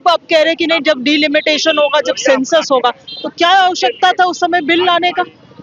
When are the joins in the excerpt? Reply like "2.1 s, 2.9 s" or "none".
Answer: none

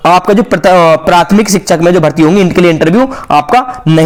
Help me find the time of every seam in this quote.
none

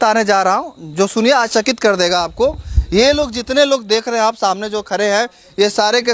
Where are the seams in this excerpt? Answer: none

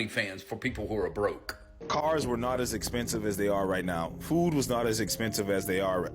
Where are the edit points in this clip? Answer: 1.8 s

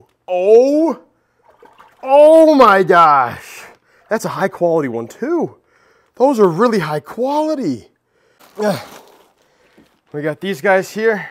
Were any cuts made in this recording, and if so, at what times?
none

